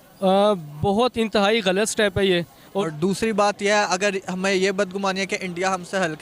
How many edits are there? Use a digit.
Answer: 1